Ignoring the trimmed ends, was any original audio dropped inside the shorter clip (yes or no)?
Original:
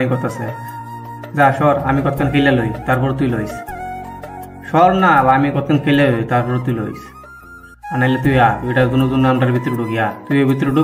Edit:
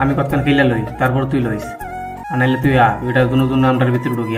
yes